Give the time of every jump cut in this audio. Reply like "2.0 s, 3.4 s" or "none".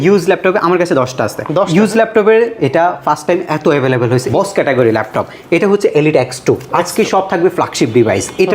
4.2 s